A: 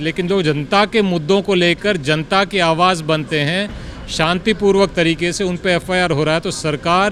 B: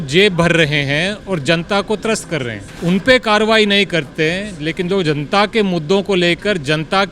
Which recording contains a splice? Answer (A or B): B